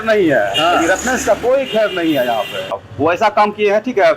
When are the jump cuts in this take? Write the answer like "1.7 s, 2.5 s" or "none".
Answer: 2.7 s